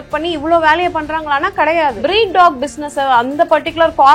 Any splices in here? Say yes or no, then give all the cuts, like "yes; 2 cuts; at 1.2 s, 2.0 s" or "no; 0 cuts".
yes; 1 cut; at 2.0 s